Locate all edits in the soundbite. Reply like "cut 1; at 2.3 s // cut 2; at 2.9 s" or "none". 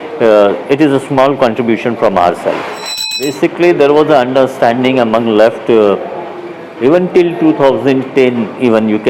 cut 1; at 3.1 s

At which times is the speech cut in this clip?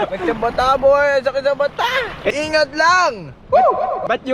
cut 1; at 2.3 s

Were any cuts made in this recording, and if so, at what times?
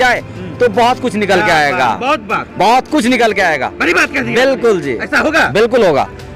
none

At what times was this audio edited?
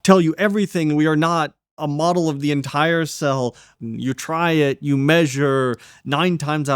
cut 1; at 3.8 s

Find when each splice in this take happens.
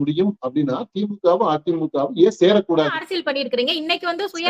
cut 1; at 3.1 s

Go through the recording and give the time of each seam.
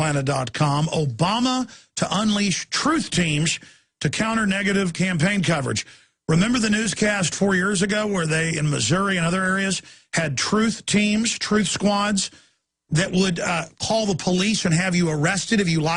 cut 1; at 14.8 s

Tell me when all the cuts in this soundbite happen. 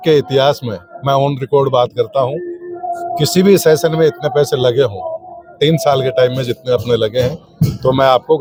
none

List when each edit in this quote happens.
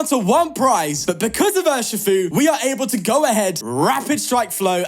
cut 1; at 1.0 s // cut 2; at 2.3 s // cut 3; at 3.6 s

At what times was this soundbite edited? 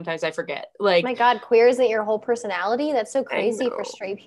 none

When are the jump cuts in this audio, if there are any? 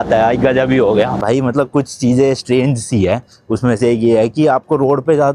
cut 1; at 1.2 s

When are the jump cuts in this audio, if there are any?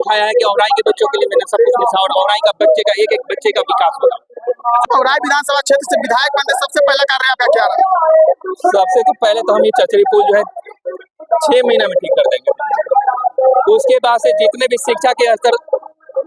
cut 1; at 4.8 s

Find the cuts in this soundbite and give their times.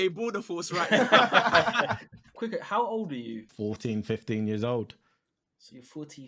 cut 1; at 2.2 s // cut 2; at 3.4 s

